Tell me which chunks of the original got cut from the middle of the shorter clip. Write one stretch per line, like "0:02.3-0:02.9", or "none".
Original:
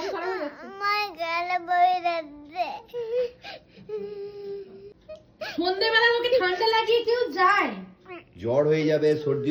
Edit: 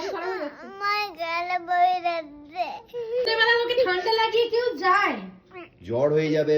0:03.3-0:05.8